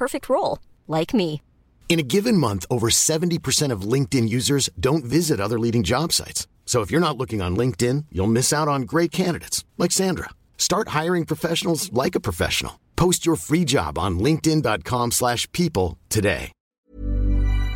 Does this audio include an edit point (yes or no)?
yes